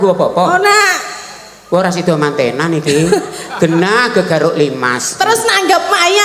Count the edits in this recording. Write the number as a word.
zero